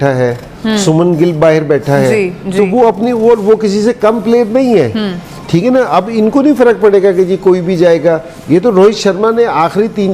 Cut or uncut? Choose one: uncut